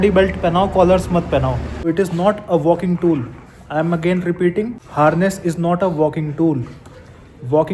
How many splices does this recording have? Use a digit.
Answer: 2